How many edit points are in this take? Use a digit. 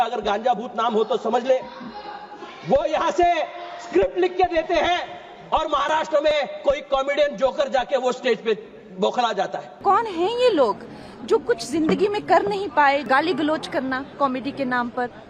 2